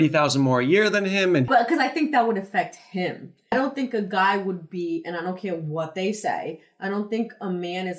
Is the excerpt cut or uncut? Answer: cut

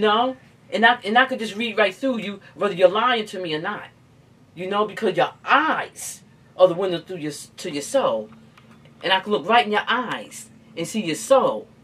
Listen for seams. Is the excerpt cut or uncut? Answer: uncut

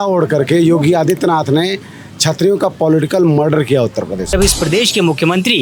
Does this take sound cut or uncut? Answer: cut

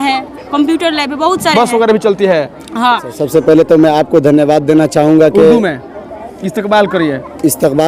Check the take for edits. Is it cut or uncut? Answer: cut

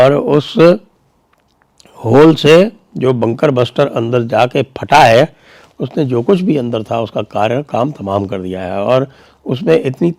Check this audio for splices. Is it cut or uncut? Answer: uncut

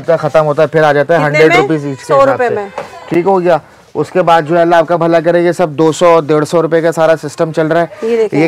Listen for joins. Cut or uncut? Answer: uncut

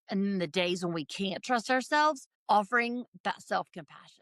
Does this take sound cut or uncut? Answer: cut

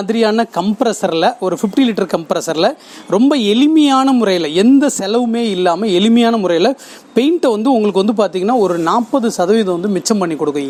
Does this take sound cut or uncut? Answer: uncut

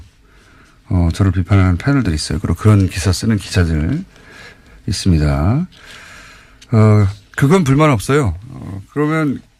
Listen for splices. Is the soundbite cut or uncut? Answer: uncut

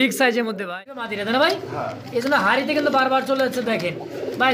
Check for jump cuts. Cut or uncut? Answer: cut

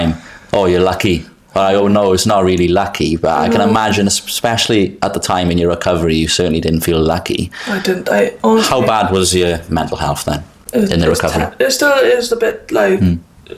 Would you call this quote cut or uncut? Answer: uncut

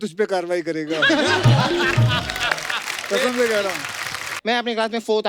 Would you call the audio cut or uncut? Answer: cut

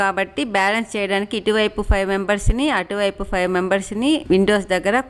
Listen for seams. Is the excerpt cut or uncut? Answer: uncut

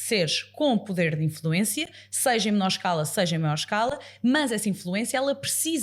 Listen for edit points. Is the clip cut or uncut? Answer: uncut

